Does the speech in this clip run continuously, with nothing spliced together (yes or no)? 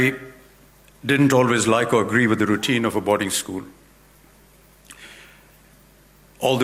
yes